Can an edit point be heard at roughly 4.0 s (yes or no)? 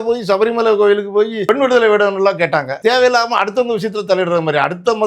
no